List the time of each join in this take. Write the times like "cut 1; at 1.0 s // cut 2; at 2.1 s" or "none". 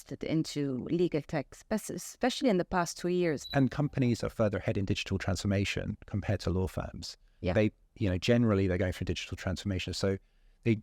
cut 1; at 3.4 s